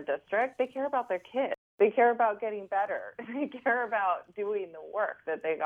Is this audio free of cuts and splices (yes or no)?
no